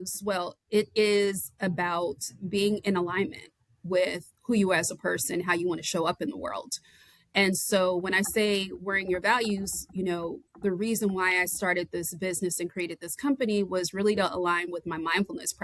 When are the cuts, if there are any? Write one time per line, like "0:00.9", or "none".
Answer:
none